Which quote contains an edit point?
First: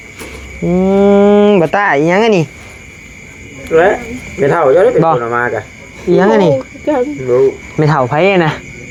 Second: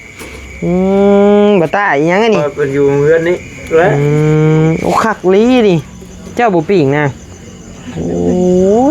second; 1 cut; at 2.5 s

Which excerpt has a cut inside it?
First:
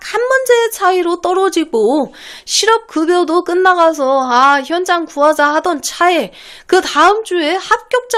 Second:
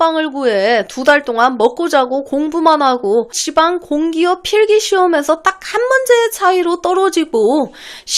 second; 1 cut; at 3.4 s

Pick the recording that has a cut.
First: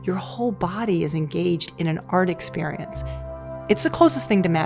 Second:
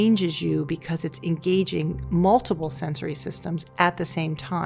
first; 1 cut; at 3.1 s

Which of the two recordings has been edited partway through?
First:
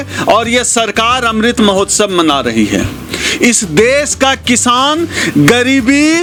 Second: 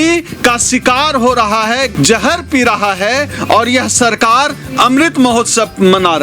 second; 1 cut; at 1.9 s

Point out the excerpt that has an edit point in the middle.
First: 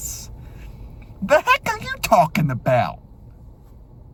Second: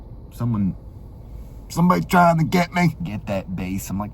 second; 1 cut; at 3.0 s

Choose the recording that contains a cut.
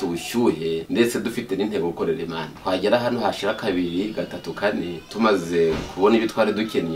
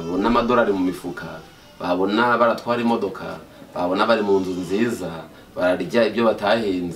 first; 3 cuts; at 0.8 s, 2.5 s, 5.0 s

